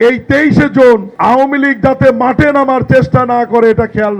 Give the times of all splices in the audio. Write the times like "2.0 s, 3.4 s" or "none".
1.1 s